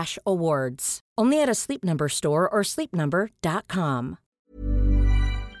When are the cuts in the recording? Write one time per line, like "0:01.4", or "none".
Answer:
0:04.4